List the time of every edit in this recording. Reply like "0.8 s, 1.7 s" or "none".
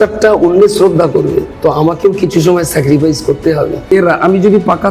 1.5 s, 3.9 s